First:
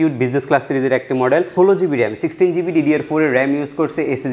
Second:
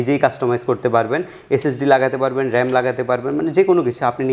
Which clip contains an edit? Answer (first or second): first